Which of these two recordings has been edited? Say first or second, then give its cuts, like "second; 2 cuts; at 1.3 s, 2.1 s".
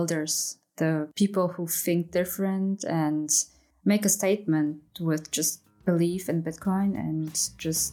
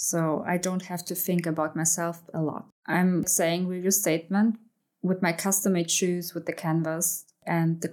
second; 2 cuts; at 2.7 s, 4.7 s